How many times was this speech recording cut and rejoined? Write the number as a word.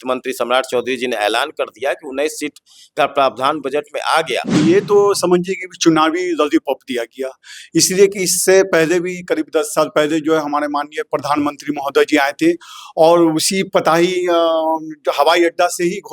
one